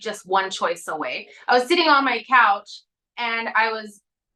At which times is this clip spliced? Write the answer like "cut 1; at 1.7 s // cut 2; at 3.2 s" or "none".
none